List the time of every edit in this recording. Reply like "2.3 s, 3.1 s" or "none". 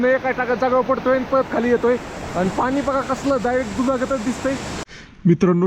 4.7 s